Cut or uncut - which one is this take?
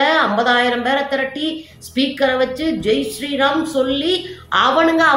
uncut